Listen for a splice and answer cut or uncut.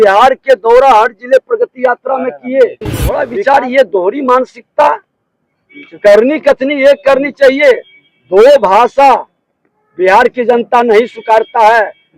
cut